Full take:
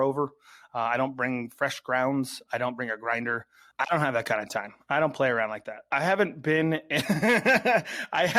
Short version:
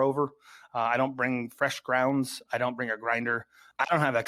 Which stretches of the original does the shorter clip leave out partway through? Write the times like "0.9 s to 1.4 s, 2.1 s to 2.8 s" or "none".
none